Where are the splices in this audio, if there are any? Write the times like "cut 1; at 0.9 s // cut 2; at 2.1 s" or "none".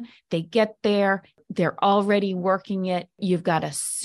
cut 1; at 1.4 s // cut 2; at 3.2 s